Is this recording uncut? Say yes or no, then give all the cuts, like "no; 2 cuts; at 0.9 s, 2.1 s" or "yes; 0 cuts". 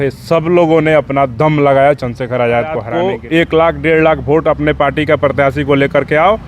no; 1 cut; at 2.9 s